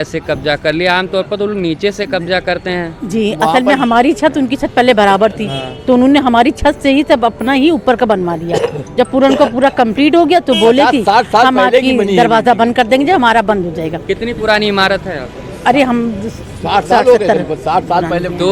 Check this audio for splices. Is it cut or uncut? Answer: uncut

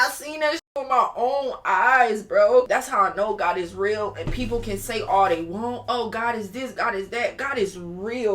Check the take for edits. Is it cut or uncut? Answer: cut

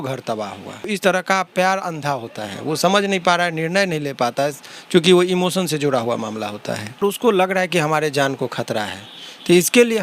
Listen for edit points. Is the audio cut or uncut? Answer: cut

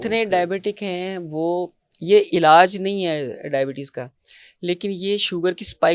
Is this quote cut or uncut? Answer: uncut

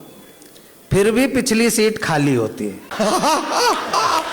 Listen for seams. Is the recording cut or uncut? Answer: cut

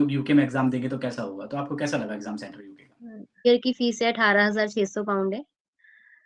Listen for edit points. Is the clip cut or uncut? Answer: cut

